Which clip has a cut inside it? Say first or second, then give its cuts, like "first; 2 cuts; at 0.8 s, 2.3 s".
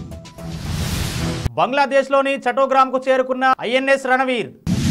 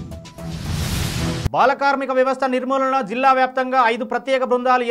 second; 1 cut; at 1.5 s